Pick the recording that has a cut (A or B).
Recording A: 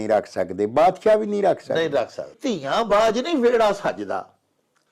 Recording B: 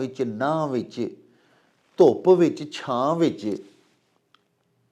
A